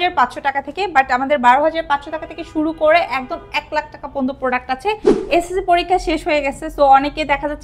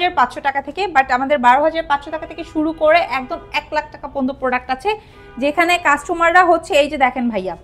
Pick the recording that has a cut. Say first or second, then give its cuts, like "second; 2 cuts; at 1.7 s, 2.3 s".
first; 1 cut; at 5.2 s